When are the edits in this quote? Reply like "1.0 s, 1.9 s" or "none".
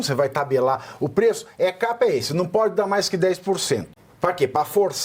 4.0 s